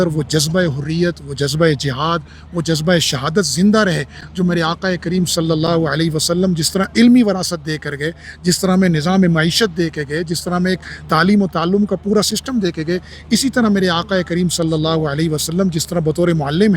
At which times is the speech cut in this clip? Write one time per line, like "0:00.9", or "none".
none